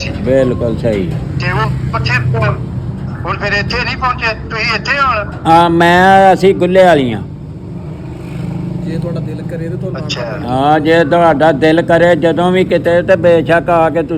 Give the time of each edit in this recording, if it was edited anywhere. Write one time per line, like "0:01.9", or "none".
none